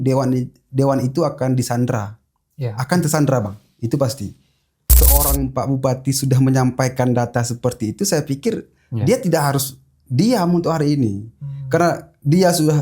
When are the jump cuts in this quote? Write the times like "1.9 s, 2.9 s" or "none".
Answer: 4.9 s